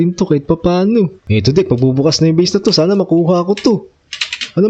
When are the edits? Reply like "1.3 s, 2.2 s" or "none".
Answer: 1.2 s